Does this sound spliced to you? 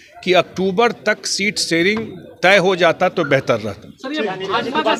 no; 0 cuts

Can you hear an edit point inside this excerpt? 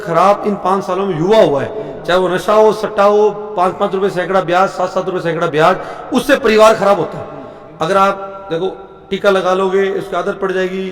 no; 0 cuts

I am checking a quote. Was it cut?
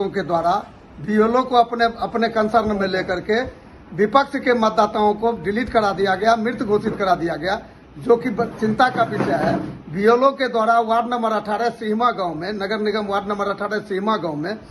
no; 0 cuts

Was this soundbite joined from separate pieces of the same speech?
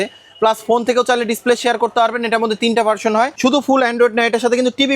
yes; 1 cut; at 3.3 s

